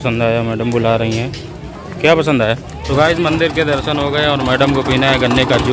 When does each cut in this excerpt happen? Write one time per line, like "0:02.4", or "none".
0:02.7